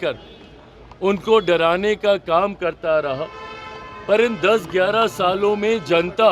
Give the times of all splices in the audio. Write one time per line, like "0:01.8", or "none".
none